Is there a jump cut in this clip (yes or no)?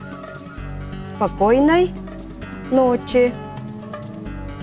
yes